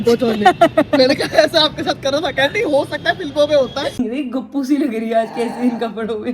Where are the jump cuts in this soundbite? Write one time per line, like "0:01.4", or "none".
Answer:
0:03.9